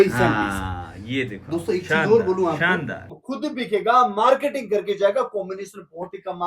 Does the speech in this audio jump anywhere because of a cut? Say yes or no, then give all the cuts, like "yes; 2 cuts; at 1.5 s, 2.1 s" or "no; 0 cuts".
yes; 1 cut; at 3.1 s